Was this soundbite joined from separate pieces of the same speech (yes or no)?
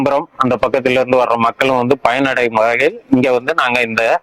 no